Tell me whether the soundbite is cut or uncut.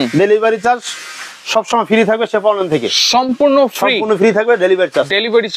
uncut